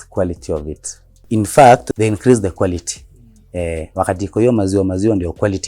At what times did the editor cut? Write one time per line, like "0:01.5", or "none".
0:01.2
0:01.9